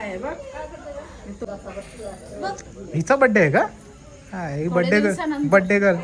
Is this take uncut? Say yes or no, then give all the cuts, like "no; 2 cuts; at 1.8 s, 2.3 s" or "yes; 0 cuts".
no; 1 cut; at 1.4 s